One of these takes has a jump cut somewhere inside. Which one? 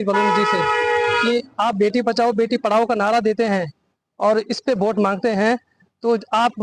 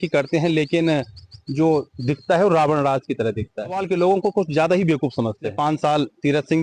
second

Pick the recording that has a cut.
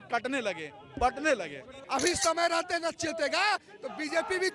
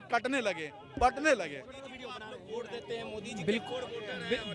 first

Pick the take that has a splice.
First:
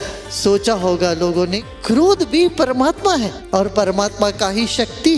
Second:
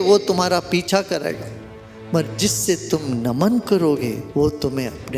second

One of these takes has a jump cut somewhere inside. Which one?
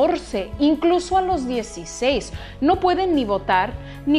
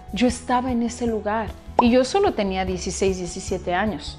second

